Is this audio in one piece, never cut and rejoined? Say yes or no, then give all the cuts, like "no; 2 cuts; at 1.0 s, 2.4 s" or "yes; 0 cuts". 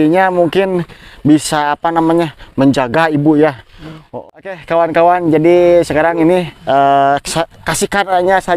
no; 1 cut; at 4.0 s